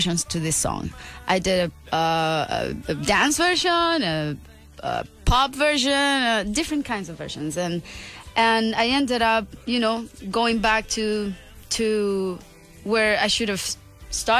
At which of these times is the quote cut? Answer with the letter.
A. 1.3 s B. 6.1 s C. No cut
A